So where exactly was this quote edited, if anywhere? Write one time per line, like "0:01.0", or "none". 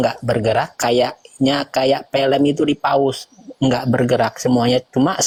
none

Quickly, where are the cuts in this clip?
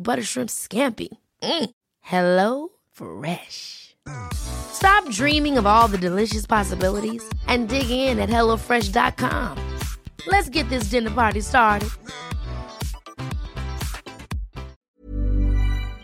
0:15.0

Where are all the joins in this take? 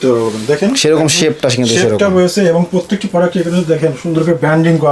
none

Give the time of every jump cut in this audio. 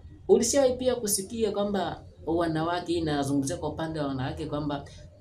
none

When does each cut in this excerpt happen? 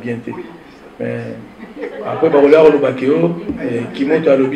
0:01.8

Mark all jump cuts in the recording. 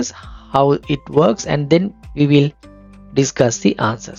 none

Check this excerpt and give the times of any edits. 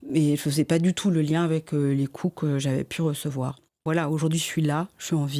0:03.8

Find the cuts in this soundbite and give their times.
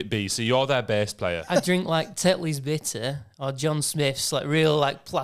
0:01.4

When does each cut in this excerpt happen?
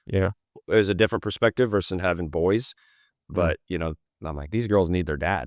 none

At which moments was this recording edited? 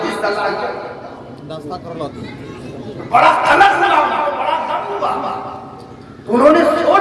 none

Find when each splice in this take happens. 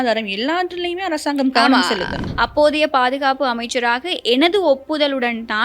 0:02.2

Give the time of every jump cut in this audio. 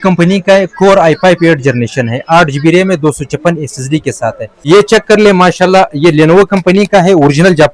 0:04.5

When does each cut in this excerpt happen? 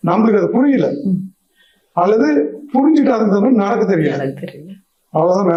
none

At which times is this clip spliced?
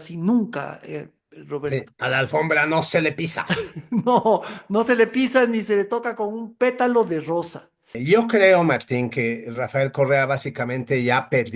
0:07.9

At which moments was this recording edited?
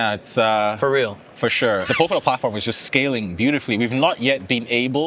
0:01.9

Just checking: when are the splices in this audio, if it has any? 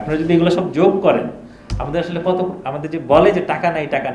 none

